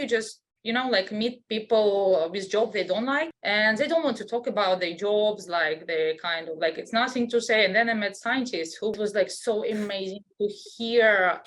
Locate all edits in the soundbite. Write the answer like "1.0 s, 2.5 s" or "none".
3.4 s, 8.9 s